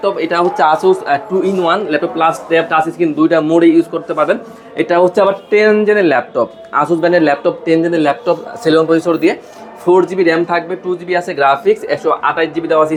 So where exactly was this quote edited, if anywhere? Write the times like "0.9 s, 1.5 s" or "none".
none